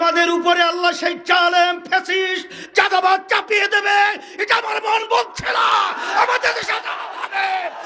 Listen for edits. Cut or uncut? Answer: uncut